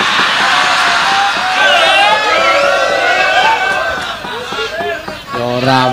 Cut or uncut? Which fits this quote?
cut